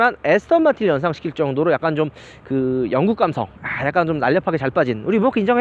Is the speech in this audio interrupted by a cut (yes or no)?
no